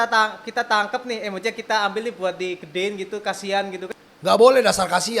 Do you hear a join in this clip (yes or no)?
yes